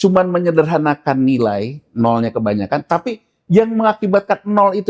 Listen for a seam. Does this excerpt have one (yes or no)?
no